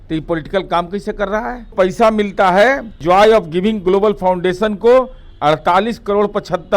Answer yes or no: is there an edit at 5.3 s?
no